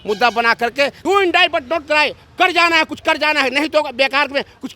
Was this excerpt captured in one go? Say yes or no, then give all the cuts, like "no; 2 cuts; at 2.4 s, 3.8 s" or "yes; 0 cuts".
no; 1 cut; at 1.0 s